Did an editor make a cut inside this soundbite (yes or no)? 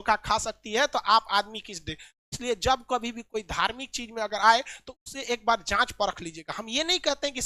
no